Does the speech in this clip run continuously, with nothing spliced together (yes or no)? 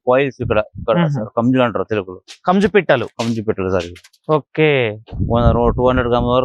yes